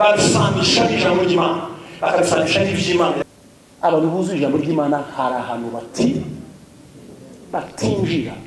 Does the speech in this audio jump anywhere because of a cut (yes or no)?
yes